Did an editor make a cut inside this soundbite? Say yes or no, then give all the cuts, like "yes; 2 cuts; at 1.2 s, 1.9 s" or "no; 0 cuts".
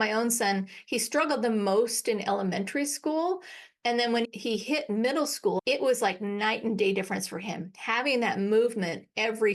yes; 1 cut; at 5.6 s